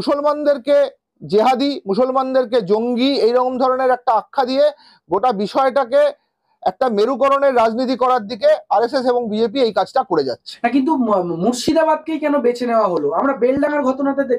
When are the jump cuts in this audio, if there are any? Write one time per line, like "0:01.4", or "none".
none